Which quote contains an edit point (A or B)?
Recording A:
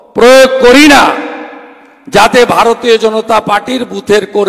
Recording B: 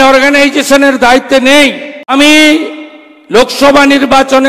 B